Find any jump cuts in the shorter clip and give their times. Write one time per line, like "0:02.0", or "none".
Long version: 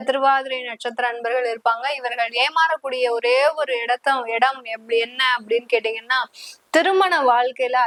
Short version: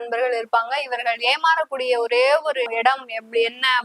0:02.7